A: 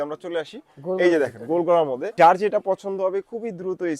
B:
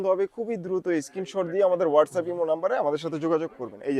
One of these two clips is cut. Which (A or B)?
A